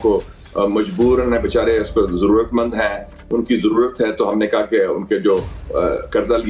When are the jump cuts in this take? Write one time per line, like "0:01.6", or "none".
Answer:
none

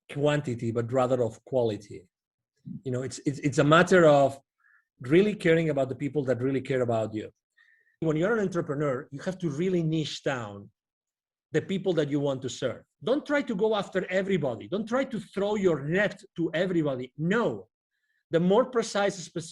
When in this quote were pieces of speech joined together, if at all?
0:08.0
0:12.9

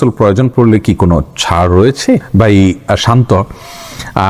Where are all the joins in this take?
none

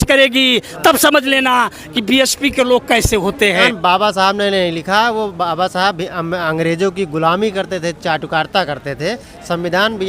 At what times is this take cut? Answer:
0:03.7

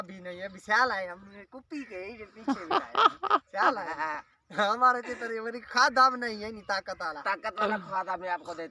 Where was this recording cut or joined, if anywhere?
none

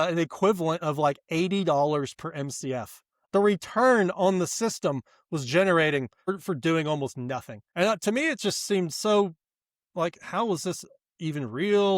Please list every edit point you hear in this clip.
0:03.2
0:06.3

